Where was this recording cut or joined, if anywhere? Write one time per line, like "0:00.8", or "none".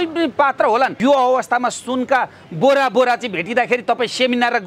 0:01.0